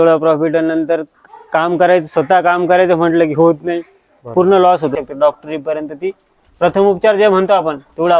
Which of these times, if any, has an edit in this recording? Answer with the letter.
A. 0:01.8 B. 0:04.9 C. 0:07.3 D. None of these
B